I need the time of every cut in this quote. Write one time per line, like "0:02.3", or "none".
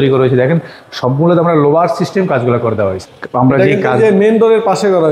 0:03.1